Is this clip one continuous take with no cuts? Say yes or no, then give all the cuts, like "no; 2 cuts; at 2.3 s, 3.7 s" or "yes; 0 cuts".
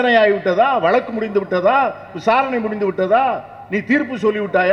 yes; 0 cuts